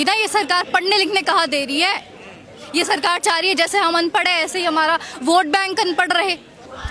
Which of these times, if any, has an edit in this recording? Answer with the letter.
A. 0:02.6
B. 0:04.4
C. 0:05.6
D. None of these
D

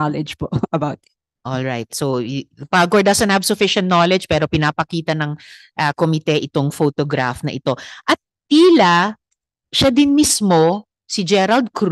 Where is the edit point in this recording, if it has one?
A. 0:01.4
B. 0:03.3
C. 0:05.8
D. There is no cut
D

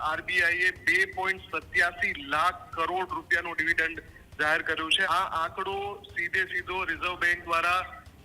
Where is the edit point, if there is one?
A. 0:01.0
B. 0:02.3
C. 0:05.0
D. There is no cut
C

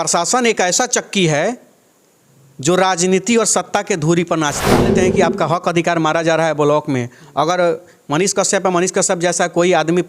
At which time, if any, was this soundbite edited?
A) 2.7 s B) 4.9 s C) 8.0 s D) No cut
B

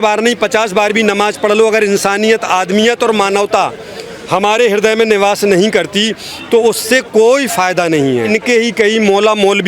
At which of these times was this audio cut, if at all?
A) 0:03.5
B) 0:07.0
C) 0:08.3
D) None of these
C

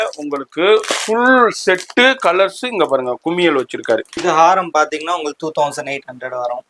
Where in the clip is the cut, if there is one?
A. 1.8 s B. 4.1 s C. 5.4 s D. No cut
B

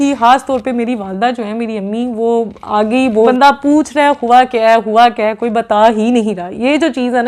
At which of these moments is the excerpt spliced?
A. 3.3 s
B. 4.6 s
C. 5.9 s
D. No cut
A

